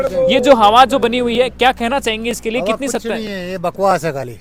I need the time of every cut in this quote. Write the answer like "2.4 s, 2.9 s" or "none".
none